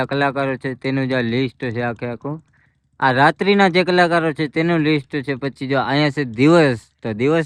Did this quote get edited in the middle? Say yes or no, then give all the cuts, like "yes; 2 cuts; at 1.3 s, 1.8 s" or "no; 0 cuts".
no; 0 cuts